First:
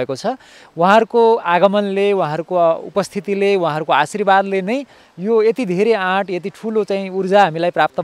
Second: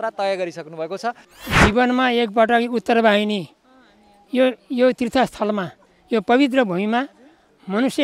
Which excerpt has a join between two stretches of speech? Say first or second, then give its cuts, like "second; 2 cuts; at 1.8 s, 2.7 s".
second; 1 cut; at 1.2 s